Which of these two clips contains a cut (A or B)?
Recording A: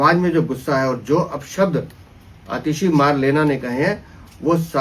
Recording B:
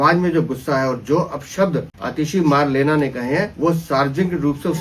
B